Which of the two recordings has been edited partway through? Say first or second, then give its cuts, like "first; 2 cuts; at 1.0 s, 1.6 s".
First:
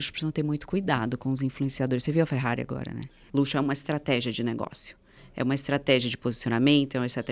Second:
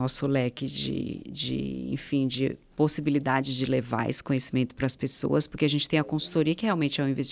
first; 1 cut; at 3.2 s